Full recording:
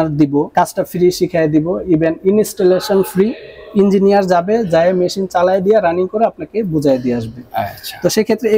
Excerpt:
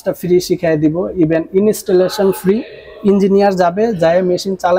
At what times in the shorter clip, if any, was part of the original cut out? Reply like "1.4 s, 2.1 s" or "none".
none